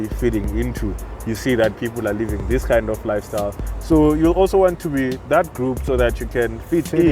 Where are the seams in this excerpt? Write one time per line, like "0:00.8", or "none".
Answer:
none